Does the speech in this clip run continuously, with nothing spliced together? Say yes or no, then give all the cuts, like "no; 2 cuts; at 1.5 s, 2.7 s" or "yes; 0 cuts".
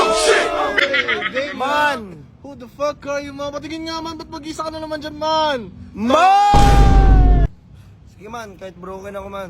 no; 2 cuts; at 0.8 s, 7.5 s